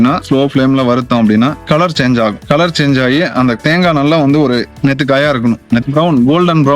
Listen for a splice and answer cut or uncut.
cut